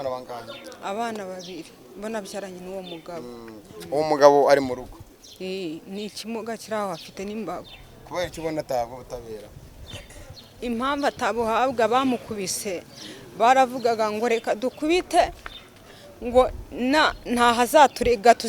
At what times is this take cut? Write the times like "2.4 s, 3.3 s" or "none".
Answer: none